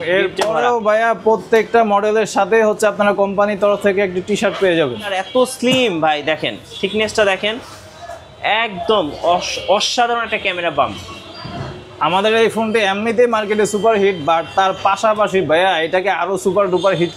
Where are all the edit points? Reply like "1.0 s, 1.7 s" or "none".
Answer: 5.2 s